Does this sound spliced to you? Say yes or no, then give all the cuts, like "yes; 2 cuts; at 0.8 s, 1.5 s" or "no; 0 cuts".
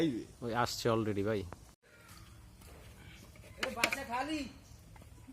yes; 1 cut; at 1.9 s